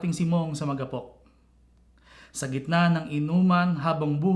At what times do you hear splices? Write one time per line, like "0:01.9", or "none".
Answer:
0:03.3